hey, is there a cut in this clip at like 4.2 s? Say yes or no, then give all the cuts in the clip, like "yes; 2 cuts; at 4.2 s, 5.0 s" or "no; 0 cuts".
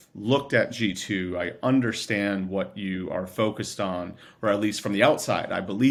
no; 0 cuts